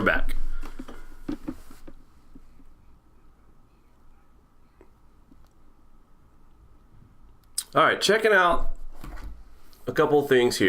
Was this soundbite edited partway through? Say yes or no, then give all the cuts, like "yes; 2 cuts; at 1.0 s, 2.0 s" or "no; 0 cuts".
yes; 1 cut; at 3.8 s